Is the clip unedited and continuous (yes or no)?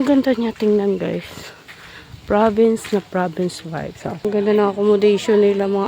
no